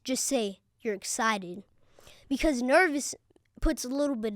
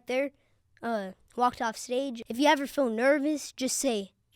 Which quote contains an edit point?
second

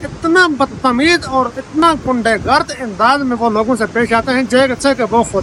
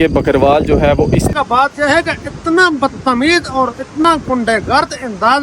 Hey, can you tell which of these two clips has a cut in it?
second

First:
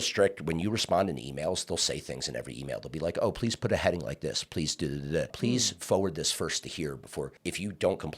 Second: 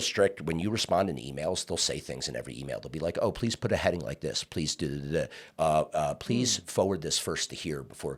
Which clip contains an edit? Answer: first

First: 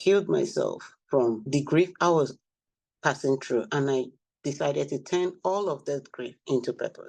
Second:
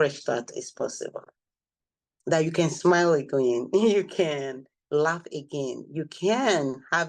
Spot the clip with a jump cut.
first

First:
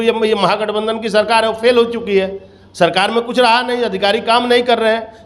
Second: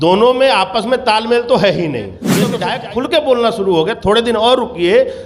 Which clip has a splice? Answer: second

